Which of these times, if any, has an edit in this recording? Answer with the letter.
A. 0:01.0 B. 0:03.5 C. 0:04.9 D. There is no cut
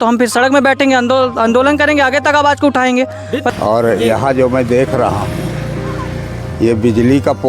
B